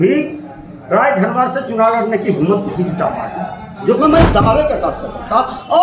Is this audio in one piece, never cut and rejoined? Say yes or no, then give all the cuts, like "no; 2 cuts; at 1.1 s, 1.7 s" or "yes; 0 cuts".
no; 1 cut; at 4.0 s